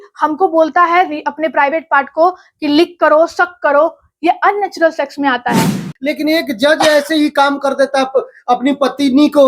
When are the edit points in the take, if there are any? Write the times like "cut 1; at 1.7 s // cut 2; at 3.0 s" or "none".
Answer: cut 1; at 5.8 s